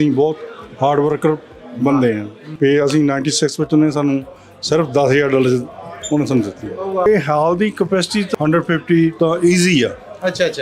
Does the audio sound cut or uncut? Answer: cut